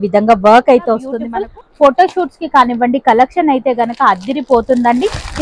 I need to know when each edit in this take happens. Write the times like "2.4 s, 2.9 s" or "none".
1.1 s